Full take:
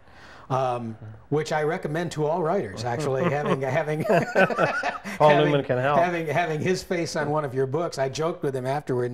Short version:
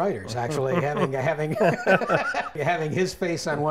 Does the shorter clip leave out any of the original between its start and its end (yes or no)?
yes